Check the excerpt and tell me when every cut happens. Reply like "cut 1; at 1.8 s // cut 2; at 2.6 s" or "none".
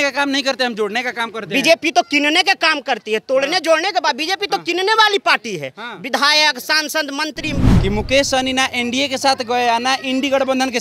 cut 1; at 7.7 s